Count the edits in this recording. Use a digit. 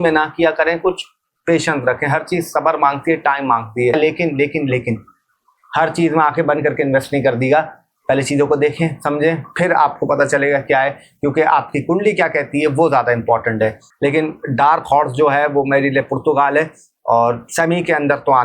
2